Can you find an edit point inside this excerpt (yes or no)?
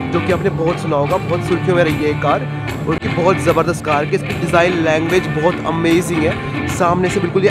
no